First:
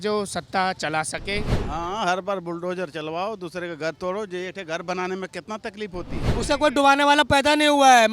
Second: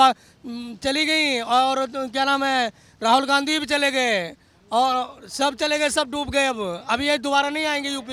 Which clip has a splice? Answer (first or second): first